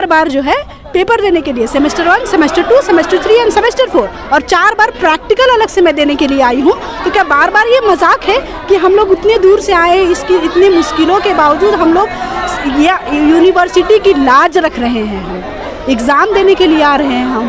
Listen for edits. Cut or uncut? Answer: uncut